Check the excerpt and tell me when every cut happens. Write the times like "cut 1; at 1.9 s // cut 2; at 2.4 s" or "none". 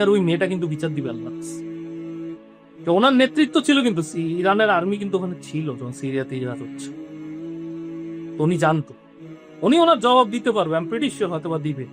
cut 1; at 1.1 s // cut 2; at 2.8 s // cut 3; at 6.5 s // cut 4; at 8.4 s

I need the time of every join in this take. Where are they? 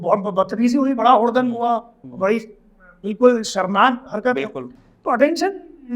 cut 1; at 4.6 s

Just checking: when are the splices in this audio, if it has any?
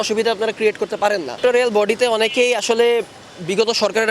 cut 1; at 1.4 s

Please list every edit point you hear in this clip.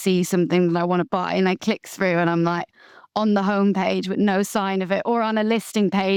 none

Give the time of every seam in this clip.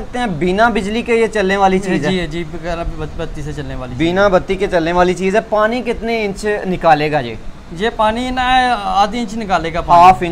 none

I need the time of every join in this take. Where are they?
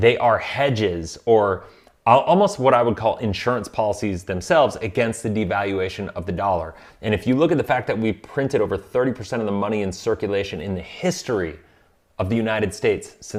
none

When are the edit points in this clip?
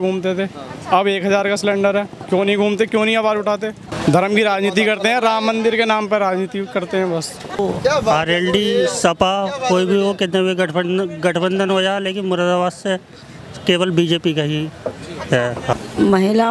cut 1; at 3.9 s // cut 2; at 7.6 s // cut 3; at 15.7 s

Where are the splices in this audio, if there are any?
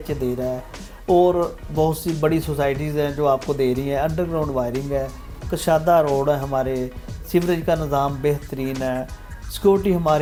none

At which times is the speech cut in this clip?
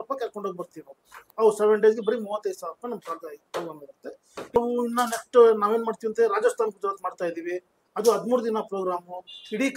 none

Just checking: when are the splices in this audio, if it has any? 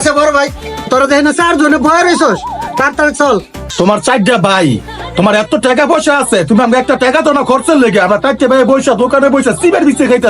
cut 1; at 3.6 s

